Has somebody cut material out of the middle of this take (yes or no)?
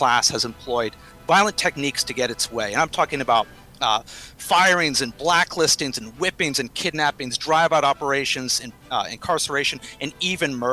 yes